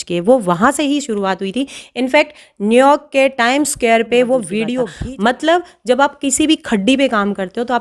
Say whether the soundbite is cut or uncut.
cut